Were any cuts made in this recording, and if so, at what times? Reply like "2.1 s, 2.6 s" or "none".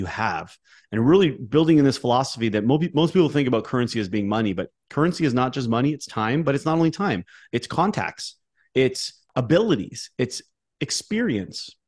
9.2 s